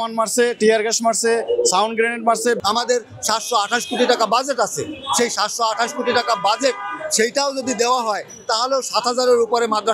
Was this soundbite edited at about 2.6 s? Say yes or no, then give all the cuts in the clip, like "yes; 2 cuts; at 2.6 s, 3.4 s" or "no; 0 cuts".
yes; 1 cut; at 2.6 s